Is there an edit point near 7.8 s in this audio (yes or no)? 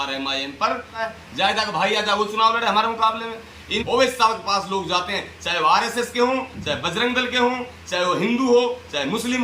no